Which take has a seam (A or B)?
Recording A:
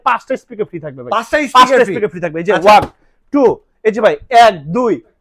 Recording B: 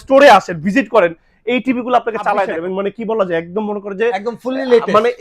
B